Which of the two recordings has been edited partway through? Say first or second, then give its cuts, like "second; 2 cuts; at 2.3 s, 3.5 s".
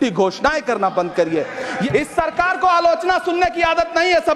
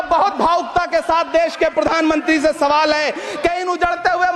first; 1 cut; at 1.8 s